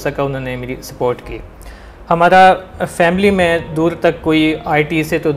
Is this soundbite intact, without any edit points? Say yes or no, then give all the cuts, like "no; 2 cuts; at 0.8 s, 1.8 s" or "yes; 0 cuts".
yes; 0 cuts